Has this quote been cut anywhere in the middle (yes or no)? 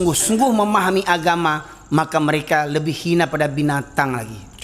no